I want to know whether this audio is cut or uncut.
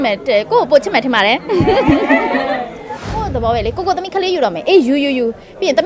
cut